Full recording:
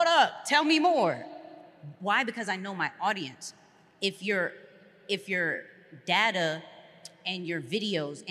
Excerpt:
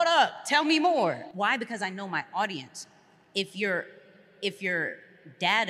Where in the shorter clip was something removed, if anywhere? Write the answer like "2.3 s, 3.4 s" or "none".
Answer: 1.3 s